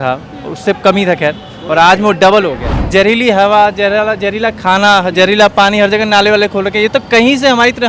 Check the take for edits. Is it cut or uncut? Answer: cut